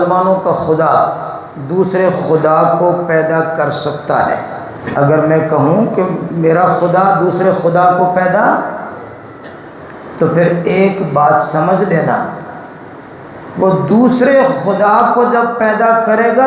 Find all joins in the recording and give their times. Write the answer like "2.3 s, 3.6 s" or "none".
4.8 s